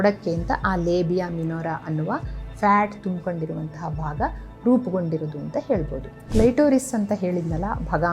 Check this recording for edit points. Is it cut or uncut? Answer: cut